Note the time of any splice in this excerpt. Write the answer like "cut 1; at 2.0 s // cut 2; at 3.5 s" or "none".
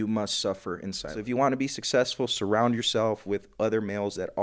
cut 1; at 1.2 s